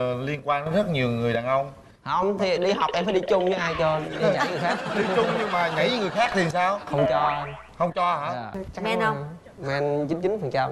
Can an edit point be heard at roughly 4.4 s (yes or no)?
no